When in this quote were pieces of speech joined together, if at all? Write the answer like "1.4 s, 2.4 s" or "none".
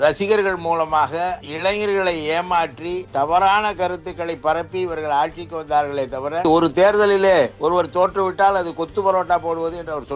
none